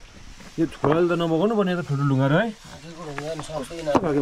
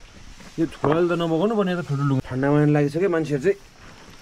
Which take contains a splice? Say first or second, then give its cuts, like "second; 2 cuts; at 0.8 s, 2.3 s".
second; 1 cut; at 2.2 s